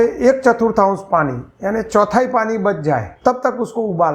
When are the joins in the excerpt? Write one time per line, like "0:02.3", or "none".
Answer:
0:03.1